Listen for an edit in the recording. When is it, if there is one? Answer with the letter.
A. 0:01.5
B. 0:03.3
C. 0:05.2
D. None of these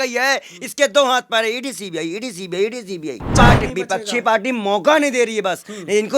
B